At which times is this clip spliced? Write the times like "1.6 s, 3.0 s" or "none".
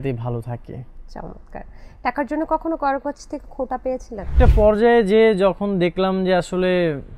4.3 s